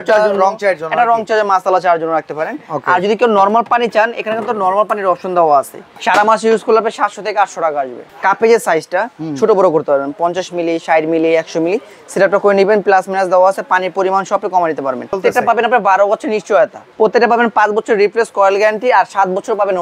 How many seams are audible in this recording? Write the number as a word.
four